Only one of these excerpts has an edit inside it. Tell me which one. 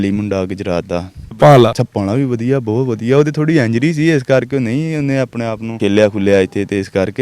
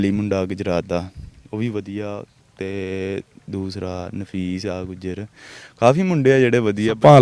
first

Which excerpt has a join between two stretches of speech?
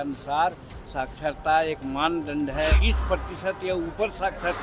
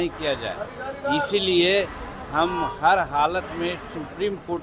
first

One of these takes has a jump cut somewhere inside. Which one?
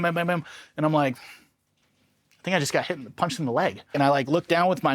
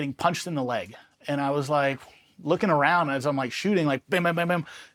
first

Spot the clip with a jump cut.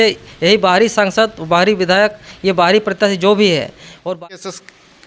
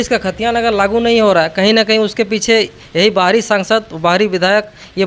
first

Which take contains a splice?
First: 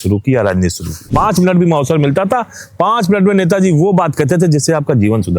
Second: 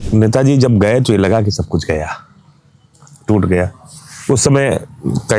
first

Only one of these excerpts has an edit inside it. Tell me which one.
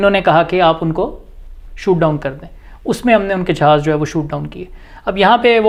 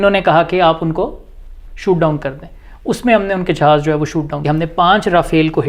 second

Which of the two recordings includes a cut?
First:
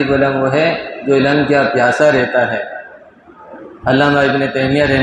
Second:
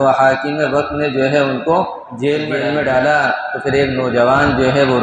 second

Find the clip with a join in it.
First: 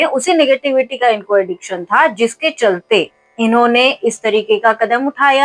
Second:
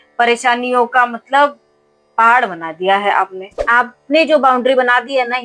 second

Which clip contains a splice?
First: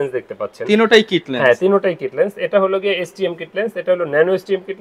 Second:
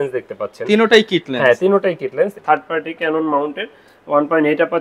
second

